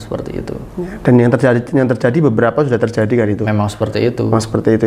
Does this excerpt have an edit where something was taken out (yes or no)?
no